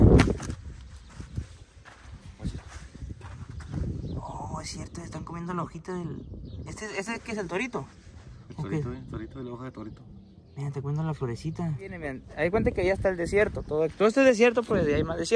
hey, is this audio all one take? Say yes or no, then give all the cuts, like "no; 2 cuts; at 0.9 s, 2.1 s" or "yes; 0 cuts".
no; 1 cut; at 12.2 s